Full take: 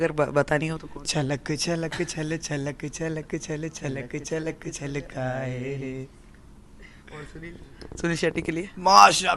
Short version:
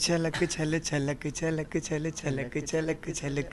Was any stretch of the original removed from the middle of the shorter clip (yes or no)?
no